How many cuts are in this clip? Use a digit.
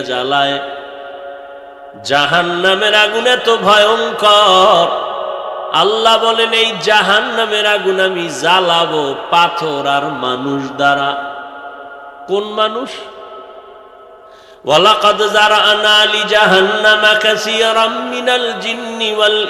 0